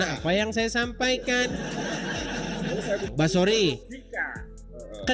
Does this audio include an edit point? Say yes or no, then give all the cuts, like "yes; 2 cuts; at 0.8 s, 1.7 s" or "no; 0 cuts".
yes; 1 cut; at 3.1 s